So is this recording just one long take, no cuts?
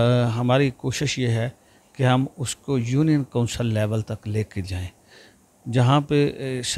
yes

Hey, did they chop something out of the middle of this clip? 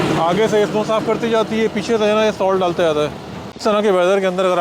yes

